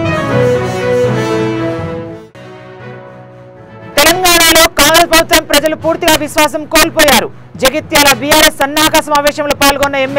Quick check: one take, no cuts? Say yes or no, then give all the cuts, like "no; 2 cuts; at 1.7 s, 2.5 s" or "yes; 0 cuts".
yes; 0 cuts